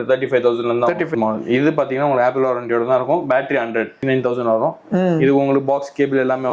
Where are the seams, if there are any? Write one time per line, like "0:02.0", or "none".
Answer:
0:01.0
0:04.0